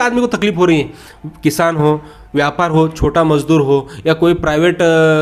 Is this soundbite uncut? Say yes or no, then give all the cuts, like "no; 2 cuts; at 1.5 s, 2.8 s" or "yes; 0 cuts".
yes; 0 cuts